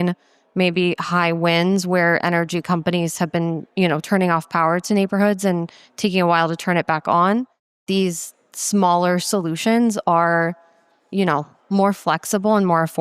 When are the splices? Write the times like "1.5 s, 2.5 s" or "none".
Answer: 7.8 s